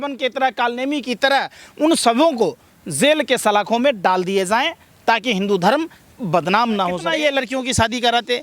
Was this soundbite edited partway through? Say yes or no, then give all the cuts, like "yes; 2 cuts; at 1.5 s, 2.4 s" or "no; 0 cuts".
yes; 1 cut; at 7.0 s